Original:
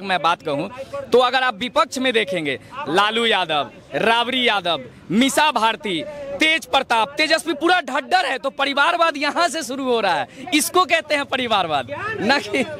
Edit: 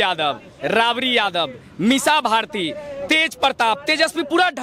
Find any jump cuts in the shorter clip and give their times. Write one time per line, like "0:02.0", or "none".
none